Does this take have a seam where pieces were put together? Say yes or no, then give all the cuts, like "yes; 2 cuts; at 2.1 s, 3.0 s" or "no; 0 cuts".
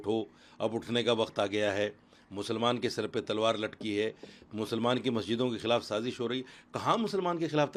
no; 0 cuts